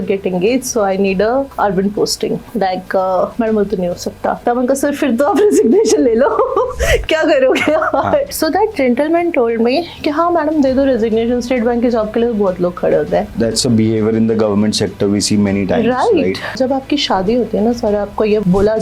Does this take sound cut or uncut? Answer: cut